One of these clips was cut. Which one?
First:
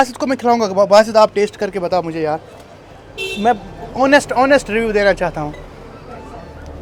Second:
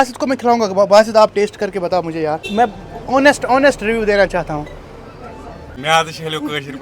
second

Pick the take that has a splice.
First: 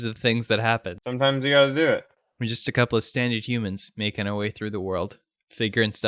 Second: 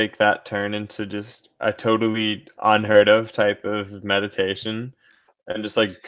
first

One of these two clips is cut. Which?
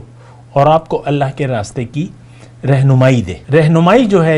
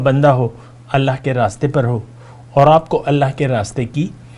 first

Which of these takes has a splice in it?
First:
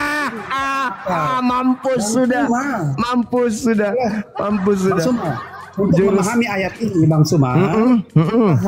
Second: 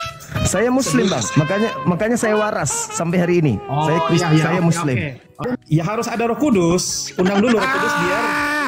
second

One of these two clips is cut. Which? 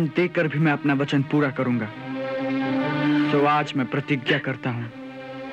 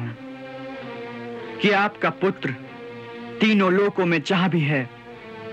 first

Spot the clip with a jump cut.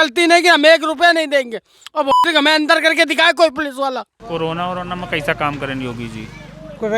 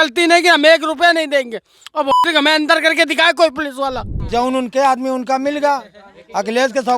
second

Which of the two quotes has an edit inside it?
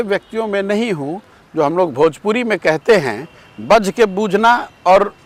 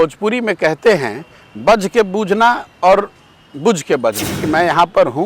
second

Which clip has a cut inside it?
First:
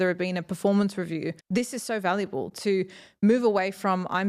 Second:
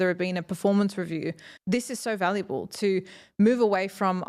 first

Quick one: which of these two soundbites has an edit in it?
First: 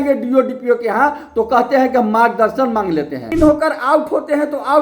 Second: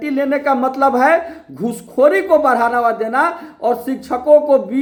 first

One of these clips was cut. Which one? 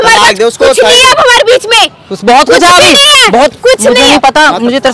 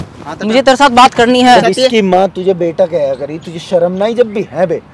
second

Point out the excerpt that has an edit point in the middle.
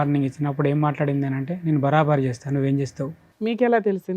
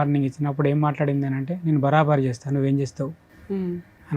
first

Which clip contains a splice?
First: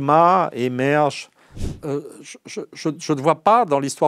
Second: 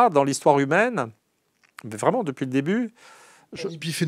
first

